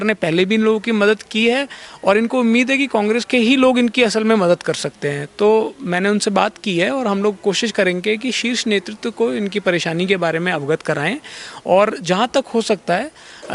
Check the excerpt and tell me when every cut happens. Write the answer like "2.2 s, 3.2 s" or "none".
none

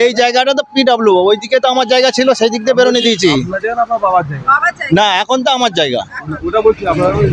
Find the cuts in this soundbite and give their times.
none

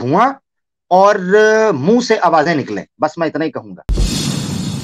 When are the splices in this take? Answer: 3.8 s

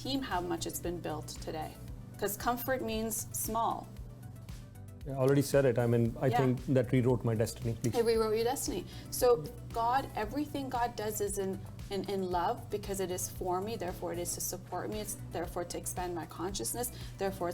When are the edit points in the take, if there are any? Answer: 9.5 s

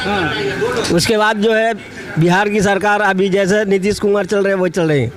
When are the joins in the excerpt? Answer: none

